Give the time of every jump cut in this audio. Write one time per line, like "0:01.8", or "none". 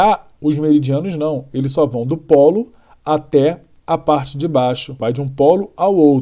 0:05.0